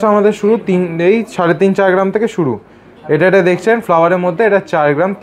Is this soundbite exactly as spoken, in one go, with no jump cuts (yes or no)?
yes